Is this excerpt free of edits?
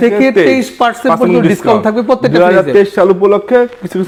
yes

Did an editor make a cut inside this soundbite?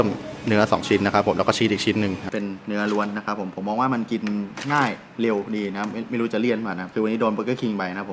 yes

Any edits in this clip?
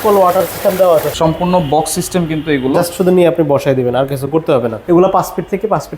yes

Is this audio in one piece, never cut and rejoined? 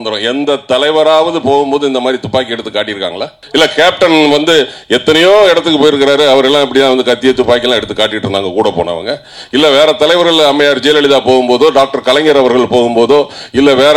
no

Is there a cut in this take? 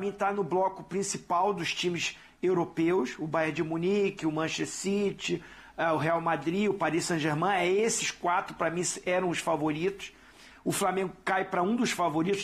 no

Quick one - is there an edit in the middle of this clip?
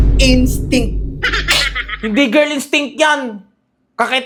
no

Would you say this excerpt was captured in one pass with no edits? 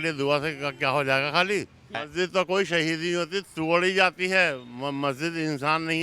no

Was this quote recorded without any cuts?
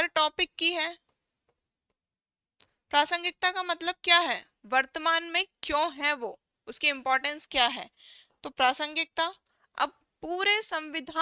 yes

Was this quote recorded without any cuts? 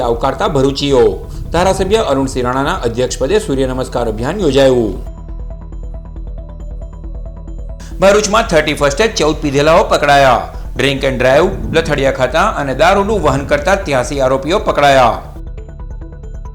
yes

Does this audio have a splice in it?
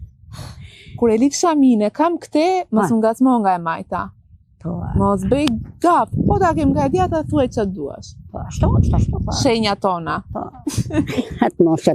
no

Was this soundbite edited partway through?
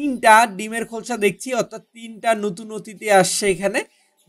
no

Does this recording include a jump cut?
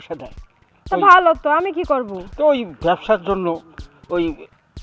no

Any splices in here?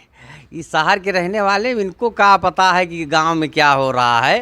no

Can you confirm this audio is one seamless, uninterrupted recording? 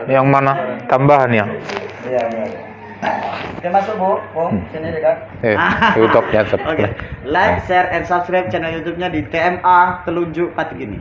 no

